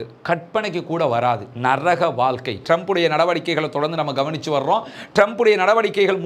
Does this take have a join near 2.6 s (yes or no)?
yes